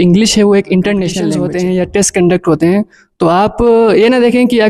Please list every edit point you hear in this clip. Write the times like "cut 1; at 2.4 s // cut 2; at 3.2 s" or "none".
cut 1; at 1.4 s